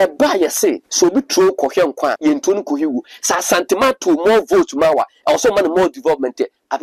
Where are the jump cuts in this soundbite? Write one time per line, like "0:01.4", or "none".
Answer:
0:00.9
0:02.2